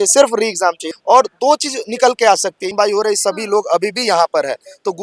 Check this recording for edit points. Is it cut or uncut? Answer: cut